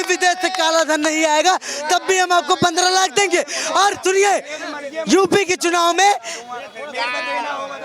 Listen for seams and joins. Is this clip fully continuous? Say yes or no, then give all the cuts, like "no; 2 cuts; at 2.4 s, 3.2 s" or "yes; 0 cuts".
yes; 0 cuts